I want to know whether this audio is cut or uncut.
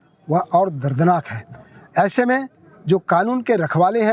uncut